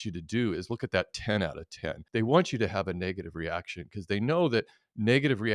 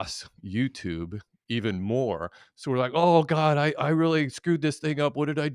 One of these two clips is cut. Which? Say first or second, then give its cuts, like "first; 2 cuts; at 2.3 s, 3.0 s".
first; 1 cut; at 1.9 s